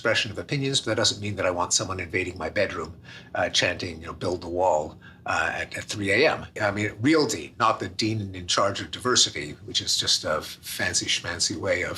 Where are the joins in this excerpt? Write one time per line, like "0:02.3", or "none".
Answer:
0:06.5